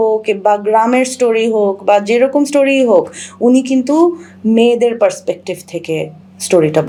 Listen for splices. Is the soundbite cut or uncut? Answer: uncut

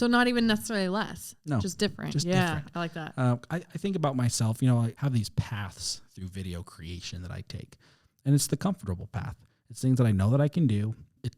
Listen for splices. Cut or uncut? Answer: cut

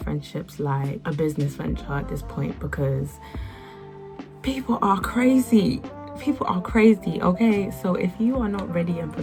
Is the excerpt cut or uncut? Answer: uncut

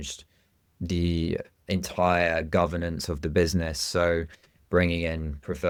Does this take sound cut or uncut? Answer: uncut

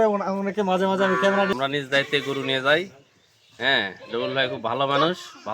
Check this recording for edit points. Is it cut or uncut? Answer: cut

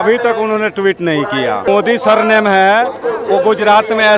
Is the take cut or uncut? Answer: cut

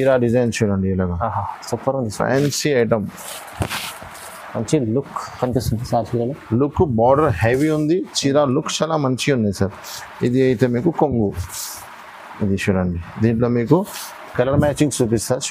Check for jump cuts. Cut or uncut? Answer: uncut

